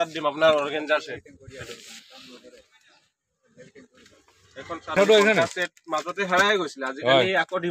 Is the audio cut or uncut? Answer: cut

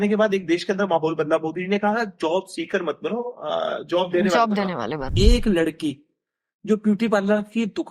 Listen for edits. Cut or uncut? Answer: cut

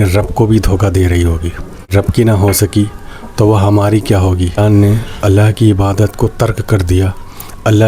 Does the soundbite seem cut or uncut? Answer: cut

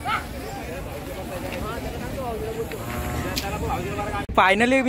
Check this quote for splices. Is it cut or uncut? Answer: uncut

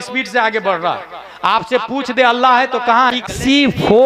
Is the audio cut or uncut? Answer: cut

